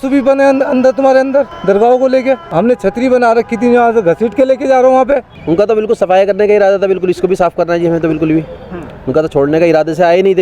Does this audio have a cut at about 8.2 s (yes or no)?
no